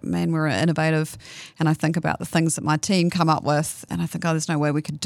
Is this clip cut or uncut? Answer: cut